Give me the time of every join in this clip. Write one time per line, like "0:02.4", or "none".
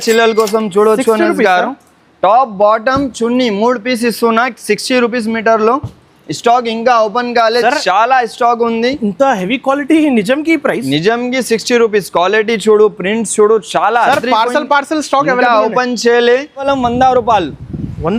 0:16.6